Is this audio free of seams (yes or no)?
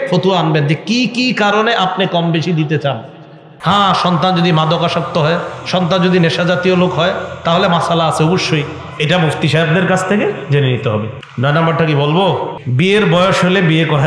no